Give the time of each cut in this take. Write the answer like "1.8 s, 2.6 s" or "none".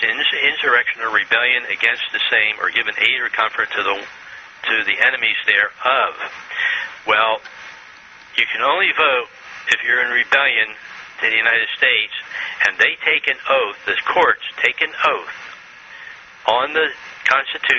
3.6 s